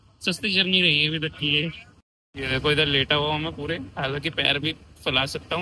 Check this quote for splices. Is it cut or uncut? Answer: uncut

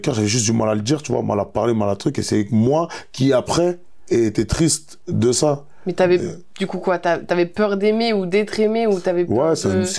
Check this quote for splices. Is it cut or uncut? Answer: uncut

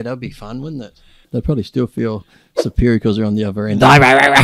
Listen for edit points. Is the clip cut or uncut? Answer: cut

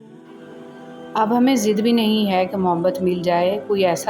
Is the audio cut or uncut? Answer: cut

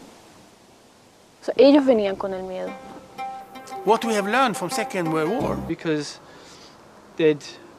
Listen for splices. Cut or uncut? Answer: uncut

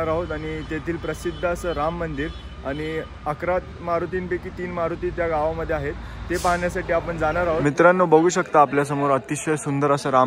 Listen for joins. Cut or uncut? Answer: cut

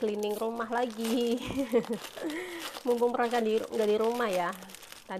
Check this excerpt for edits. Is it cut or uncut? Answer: uncut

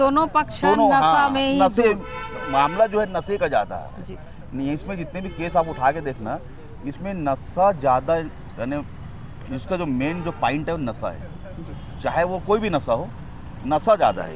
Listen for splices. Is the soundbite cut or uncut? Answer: uncut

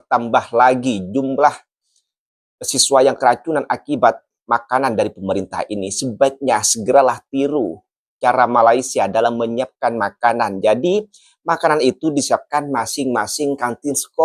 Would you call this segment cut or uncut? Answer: uncut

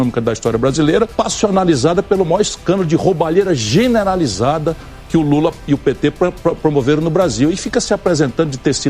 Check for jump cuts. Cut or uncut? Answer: cut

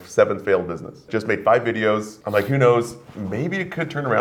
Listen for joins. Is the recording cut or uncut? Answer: cut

